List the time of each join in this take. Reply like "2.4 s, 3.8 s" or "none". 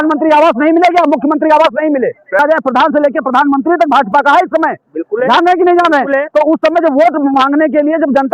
2.4 s